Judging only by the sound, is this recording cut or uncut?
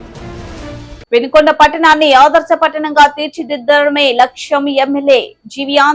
cut